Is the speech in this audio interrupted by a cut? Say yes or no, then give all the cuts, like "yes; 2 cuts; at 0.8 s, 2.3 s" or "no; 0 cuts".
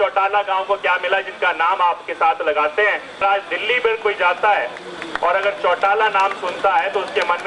yes; 1 cut; at 3.2 s